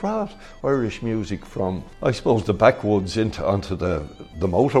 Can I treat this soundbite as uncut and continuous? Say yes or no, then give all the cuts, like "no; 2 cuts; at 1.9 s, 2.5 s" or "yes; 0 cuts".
no; 1 cut; at 1.9 s